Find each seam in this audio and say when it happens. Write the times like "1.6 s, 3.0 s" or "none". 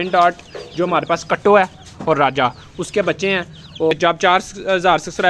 3.9 s

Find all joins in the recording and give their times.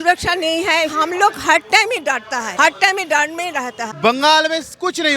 0.9 s, 3.8 s

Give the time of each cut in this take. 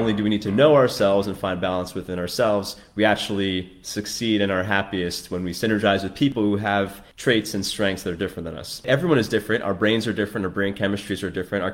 6.6 s, 8.8 s

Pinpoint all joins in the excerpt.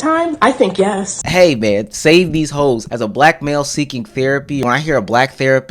1.1 s, 2.9 s, 4.6 s

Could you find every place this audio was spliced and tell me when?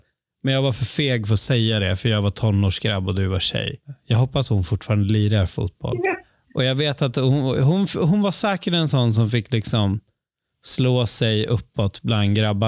3.9 s, 6.3 s

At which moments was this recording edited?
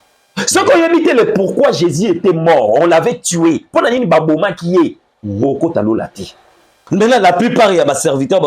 6.8 s

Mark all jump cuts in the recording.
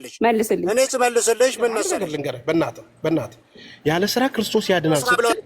2.0 s

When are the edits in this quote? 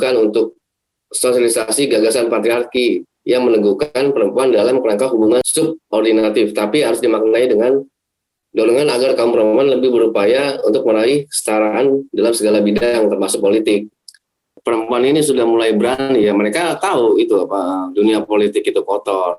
5.5 s, 14.5 s

